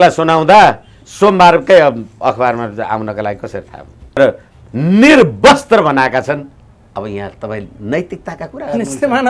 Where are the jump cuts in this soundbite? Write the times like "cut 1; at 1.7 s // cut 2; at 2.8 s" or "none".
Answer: cut 1; at 4.2 s